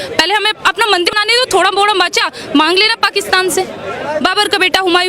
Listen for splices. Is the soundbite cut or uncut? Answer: cut